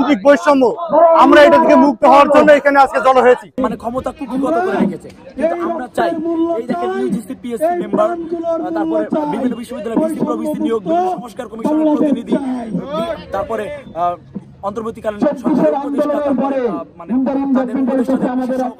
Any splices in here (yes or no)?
yes